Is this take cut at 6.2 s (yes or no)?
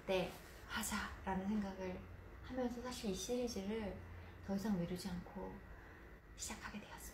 yes